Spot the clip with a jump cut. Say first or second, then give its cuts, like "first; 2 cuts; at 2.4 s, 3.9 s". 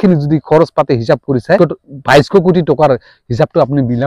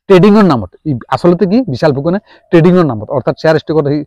first; 1 cut; at 1.6 s